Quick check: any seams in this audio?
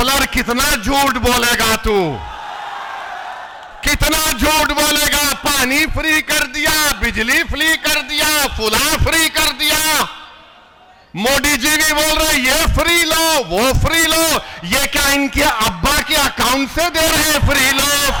no; 0 cuts

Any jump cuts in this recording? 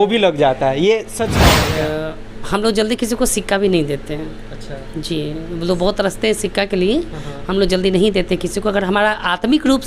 yes; 1 cut; at 1.5 s

